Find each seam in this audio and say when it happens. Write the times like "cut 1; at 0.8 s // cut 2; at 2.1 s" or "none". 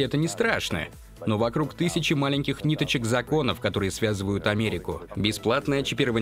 cut 1; at 5.1 s